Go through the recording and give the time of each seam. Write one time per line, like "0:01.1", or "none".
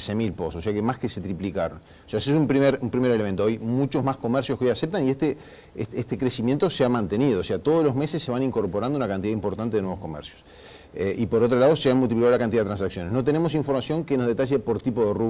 none